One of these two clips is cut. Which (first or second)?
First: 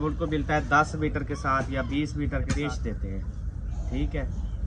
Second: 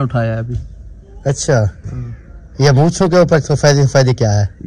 first